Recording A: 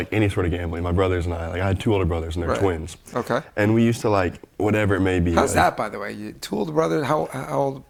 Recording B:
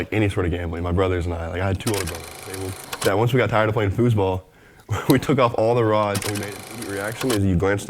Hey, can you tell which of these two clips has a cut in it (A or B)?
B